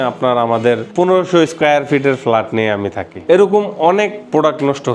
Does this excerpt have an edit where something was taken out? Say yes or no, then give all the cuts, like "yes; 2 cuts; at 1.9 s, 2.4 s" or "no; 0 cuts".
yes; 1 cut; at 3.2 s